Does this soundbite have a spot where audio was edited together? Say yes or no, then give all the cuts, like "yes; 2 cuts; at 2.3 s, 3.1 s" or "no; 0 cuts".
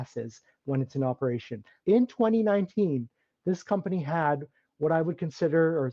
yes; 1 cut; at 1.7 s